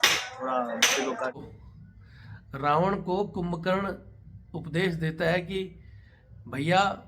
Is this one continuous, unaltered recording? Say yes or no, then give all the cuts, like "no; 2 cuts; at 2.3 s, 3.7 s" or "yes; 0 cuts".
no; 1 cut; at 1.4 s